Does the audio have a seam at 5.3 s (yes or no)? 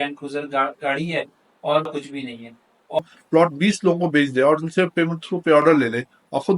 no